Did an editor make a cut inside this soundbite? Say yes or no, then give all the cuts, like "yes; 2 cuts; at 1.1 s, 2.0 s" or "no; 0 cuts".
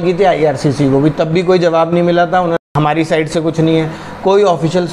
yes; 1 cut; at 2.6 s